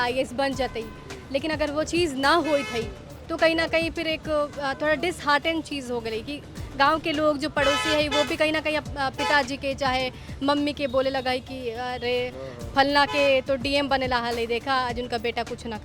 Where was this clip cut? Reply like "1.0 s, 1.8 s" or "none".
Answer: none